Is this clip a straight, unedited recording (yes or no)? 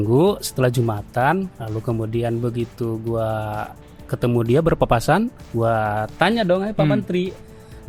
yes